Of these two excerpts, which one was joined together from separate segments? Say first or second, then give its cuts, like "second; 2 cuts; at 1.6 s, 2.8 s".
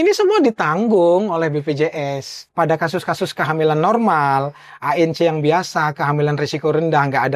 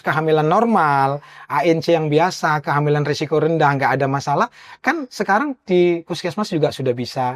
first; 1 cut; at 2.4 s